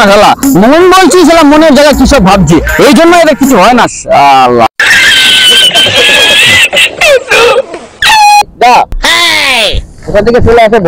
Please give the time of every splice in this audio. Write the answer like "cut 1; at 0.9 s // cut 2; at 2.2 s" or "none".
none